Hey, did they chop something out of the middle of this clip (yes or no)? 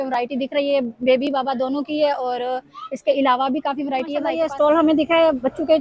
yes